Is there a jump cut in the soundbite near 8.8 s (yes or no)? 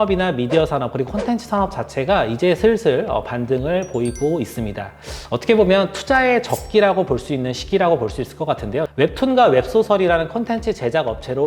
yes